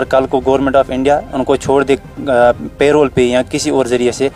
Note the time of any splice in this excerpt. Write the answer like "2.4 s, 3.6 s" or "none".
none